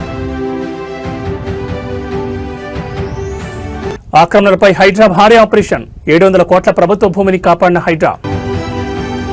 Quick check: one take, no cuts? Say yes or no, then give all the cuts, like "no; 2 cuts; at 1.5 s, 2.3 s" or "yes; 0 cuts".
no; 2 cuts; at 4.0 s, 8.2 s